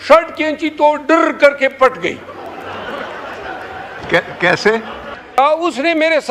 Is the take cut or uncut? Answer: cut